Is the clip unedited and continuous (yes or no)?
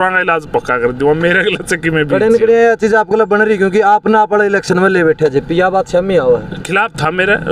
yes